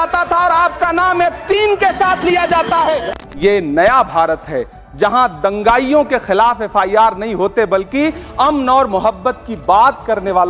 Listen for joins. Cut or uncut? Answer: cut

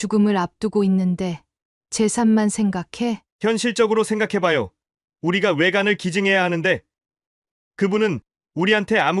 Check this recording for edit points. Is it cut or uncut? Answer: uncut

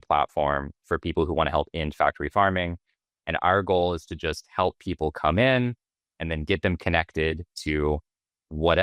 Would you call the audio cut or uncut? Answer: uncut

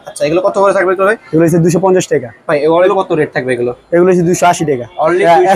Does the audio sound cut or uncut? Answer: cut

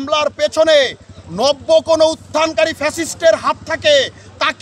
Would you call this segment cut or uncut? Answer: uncut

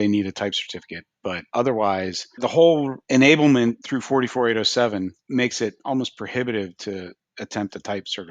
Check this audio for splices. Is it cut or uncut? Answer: cut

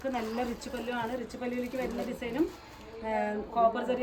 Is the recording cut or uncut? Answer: uncut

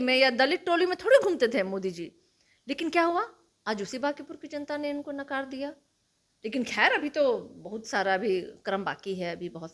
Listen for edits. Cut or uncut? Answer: uncut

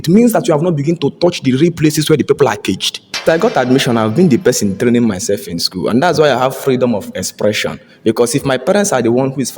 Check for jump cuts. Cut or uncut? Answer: cut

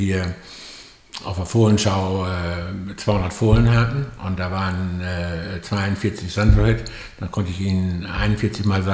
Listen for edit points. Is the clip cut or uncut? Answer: uncut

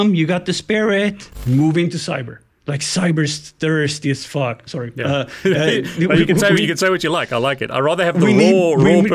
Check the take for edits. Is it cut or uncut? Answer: cut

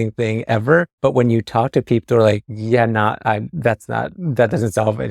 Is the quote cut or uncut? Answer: cut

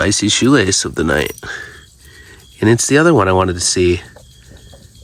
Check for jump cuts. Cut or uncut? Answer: uncut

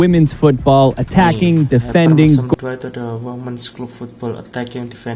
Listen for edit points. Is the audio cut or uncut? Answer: uncut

